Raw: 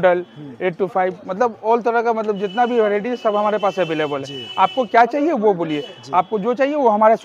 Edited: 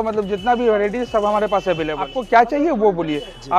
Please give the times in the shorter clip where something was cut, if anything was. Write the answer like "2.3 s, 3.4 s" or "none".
2.2 s